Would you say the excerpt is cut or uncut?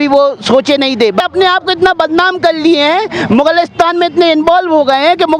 cut